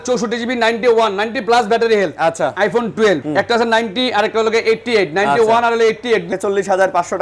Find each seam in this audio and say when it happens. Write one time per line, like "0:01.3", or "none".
0:03.2
0:06.3